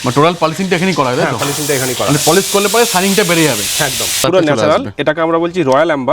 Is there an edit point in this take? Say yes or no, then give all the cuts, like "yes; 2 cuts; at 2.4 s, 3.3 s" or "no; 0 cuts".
yes; 1 cut; at 4.2 s